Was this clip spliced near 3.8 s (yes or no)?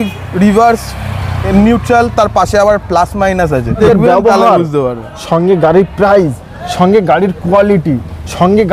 yes